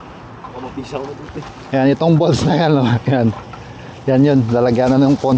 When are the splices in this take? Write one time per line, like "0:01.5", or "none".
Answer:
none

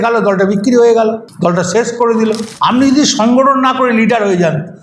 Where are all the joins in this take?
0:02.5

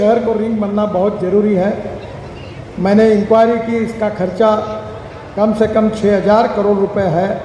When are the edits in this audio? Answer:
none

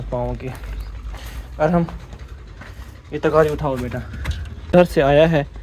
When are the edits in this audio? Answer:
0:04.6

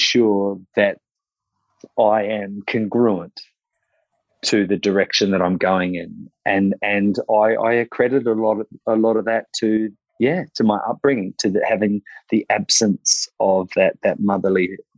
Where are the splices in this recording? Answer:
none

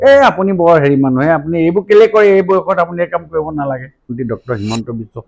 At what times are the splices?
0:04.1

